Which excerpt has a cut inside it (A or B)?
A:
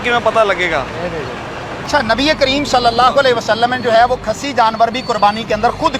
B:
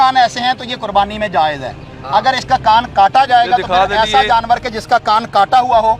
A